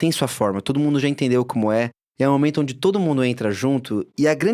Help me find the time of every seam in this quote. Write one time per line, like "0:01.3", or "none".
0:02.0